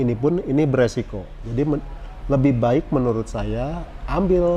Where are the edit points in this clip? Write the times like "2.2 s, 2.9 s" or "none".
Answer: none